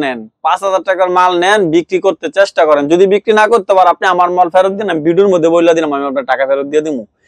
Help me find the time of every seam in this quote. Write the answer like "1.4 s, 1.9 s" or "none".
none